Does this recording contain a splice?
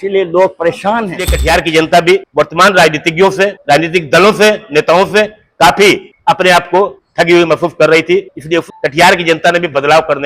yes; 6 cuts; at 1.3 s, 2.3 s, 3.6 s, 6.1 s, 7.0 s, 8.6 s

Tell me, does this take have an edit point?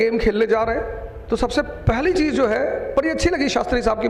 no; 0 cuts

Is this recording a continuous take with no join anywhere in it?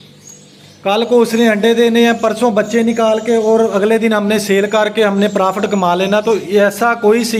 yes; 0 cuts

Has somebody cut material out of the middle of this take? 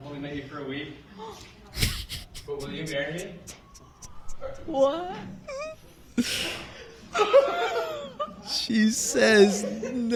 no; 0 cuts

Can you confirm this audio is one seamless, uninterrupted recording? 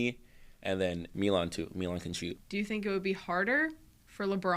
no; 2 cuts; at 1.1 s, 2.4 s

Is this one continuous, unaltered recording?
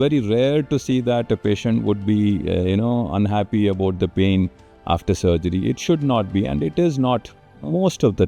yes; 0 cuts

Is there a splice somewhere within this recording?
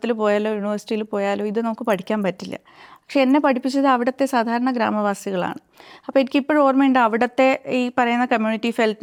no; 0 cuts

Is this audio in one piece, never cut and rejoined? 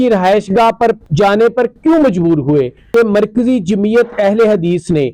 no; 2 cuts; at 1.0 s, 2.8 s

